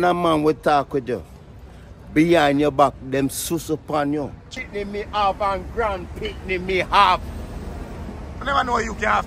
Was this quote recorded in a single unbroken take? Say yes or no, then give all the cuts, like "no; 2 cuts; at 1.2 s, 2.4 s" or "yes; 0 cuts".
no; 1 cut; at 4.6 s